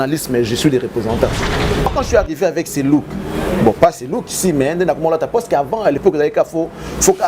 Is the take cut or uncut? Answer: cut